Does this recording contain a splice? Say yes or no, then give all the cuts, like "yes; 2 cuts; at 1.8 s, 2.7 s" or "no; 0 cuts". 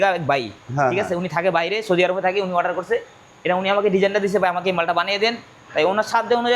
no; 0 cuts